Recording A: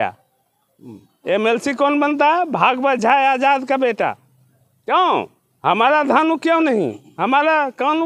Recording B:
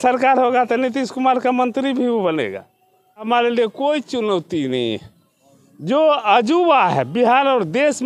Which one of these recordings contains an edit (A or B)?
B